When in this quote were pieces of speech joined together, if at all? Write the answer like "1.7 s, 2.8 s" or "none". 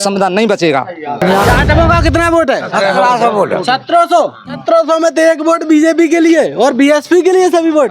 1.2 s, 4.6 s